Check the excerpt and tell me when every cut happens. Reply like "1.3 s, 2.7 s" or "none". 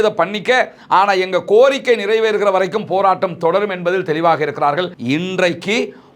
4.9 s